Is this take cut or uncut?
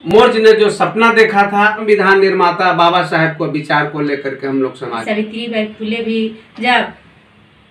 cut